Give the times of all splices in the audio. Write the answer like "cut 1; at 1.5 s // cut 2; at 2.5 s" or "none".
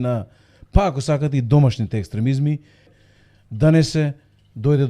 cut 1; at 3.0 s